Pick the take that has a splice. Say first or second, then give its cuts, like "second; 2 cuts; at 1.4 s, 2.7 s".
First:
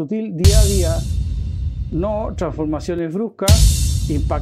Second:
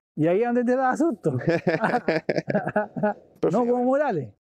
second; 1 cut; at 3.4 s